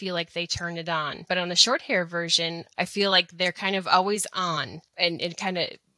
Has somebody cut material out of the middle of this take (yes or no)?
yes